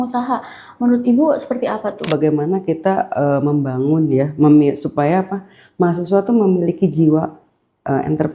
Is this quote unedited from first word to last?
no; 1 cut; at 2.1 s

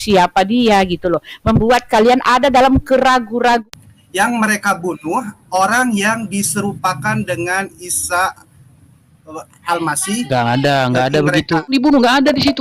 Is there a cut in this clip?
yes; 2 cuts; at 3.7 s, 11.7 s

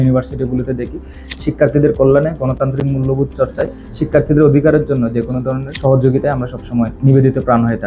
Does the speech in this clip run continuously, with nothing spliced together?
no; 3 cuts; at 1.2 s, 5.7 s, 6.9 s

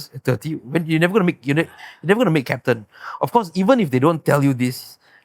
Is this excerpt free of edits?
yes; 0 cuts

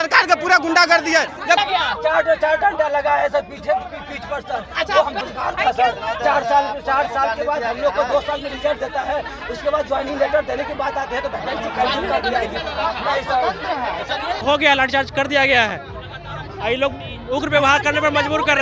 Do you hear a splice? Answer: yes; 3 cuts; at 1.6 s, 5.2 s, 14.4 s

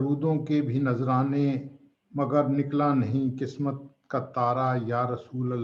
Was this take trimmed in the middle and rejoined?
no; 0 cuts

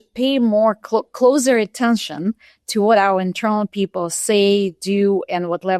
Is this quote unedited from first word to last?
yes; 0 cuts

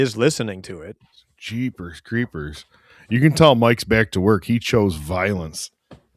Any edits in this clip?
no; 0 cuts

